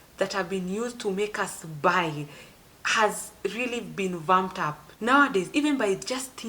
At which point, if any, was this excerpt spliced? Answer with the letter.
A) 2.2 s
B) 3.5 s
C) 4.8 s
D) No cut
C